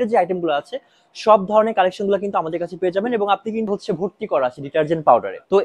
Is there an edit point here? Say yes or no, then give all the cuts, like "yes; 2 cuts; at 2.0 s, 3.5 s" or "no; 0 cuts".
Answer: yes; 1 cut; at 3.7 s